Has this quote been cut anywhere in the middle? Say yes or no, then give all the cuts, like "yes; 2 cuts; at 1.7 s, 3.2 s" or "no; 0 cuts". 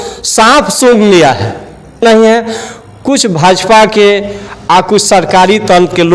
yes; 1 cut; at 2.0 s